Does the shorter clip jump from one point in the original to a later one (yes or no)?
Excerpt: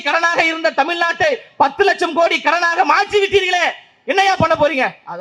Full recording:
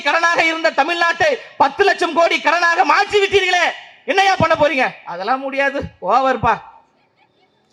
no